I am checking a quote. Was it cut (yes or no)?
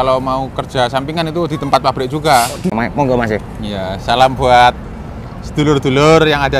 yes